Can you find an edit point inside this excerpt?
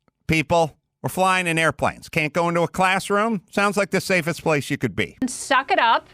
yes; 2 cuts; at 1.1 s, 5.1 s

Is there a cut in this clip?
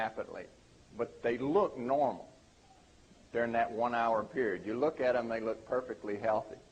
yes; 1 cut; at 3.2 s

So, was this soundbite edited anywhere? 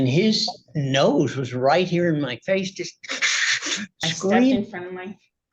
yes; 1 cut; at 4.6 s

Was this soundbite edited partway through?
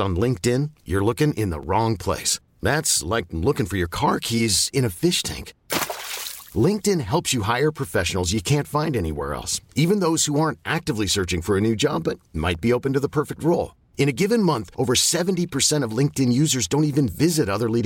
no; 0 cuts

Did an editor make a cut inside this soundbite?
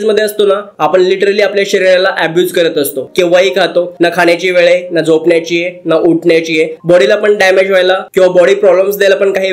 yes; 2 cuts; at 3.0 s, 6.8 s

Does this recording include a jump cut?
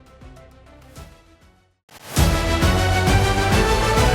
yes; 1 cut; at 1.8 s

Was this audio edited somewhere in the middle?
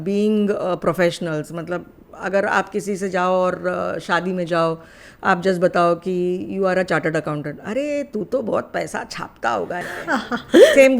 no; 0 cuts

